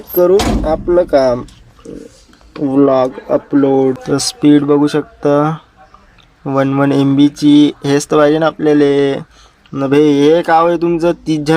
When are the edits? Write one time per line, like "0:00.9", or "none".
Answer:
0:04.0